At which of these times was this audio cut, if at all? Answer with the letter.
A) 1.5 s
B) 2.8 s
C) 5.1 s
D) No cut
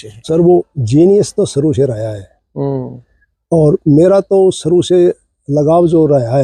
D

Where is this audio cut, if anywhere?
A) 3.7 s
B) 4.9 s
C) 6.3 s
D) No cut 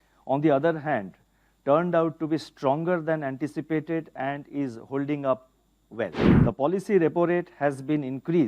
C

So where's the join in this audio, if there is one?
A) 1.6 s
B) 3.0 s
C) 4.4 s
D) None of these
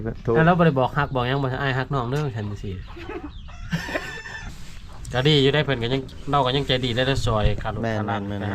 C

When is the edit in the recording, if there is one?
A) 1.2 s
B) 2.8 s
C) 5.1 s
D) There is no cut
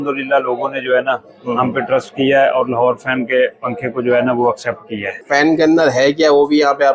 C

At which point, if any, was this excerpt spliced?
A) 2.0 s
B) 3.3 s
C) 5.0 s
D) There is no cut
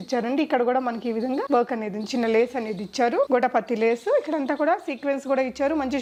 D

